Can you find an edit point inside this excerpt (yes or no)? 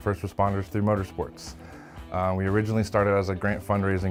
no